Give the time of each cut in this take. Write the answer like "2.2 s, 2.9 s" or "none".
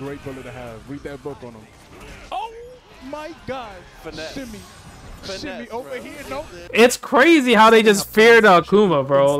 6.6 s